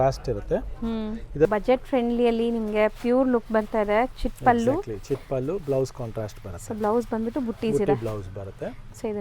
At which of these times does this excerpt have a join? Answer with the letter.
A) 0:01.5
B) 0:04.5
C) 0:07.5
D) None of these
A